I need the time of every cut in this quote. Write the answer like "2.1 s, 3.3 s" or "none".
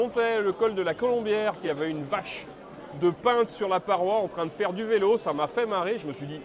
1.6 s